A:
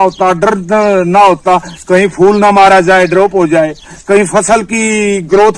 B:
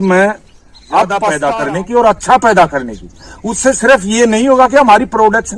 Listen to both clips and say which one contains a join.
B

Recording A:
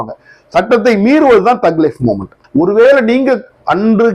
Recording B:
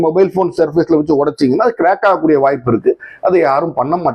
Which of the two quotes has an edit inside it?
A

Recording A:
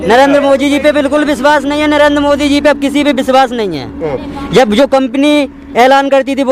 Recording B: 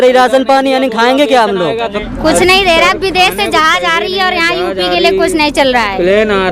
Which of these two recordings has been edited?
B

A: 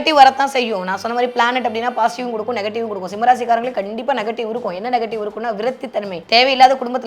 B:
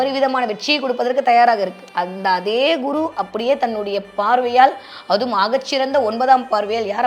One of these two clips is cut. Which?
A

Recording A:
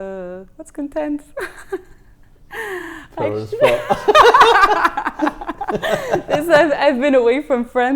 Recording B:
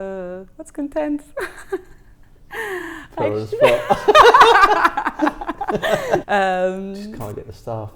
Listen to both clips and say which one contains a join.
B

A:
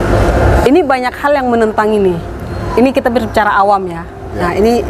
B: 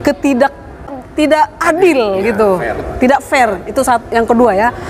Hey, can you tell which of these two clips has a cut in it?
B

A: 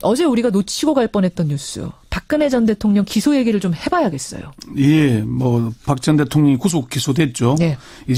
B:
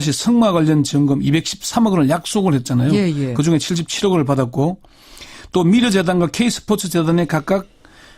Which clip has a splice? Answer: B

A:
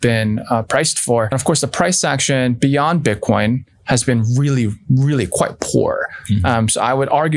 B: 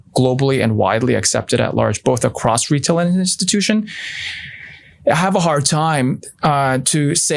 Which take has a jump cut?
A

